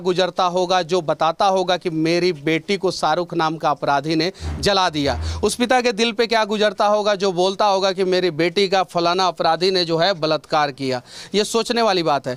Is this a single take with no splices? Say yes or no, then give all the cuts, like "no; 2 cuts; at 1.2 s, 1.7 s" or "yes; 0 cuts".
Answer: yes; 0 cuts